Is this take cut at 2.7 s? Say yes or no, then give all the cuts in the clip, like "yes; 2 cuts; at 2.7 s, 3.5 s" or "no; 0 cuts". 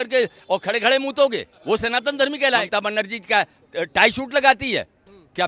yes; 2 cuts; at 1.5 s, 2.7 s